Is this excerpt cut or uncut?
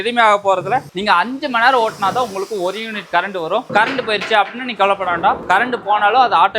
cut